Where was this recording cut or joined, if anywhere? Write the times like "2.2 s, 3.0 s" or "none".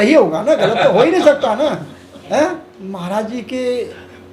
2.8 s